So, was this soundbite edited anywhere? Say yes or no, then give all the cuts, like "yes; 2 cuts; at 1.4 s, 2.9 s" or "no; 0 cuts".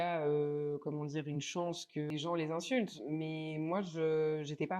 yes; 1 cut; at 2.1 s